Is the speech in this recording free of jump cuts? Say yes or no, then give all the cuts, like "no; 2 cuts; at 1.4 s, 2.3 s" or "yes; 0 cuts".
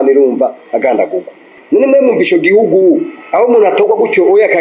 no; 1 cut; at 1.6 s